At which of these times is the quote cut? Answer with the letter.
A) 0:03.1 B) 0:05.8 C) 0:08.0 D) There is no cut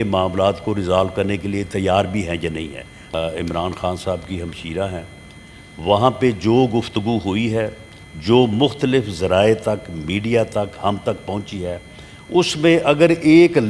A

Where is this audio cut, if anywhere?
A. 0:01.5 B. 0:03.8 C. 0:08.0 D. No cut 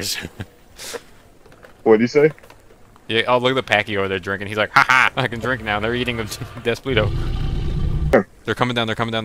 C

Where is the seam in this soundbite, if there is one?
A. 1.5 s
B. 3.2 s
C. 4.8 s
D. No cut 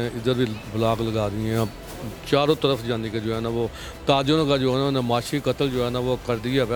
D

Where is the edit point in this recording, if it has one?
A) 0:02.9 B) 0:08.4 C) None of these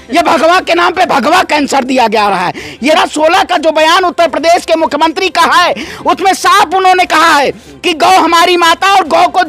A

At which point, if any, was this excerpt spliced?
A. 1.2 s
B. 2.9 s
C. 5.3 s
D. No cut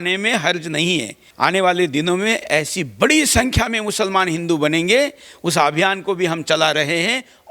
A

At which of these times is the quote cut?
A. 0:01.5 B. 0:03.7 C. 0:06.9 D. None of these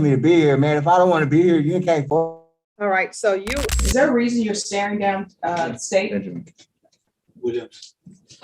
B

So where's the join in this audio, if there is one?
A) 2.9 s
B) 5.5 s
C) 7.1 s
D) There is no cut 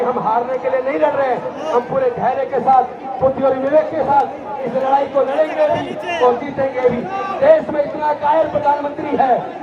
D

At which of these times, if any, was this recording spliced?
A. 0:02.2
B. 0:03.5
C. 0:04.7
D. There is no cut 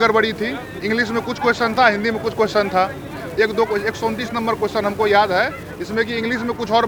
D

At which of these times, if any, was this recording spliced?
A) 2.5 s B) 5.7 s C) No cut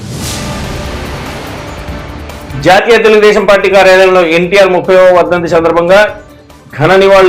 A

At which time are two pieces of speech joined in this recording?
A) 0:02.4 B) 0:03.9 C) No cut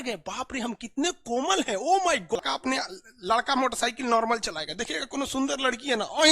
A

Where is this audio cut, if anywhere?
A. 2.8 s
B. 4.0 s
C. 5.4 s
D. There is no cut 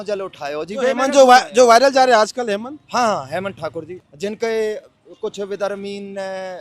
B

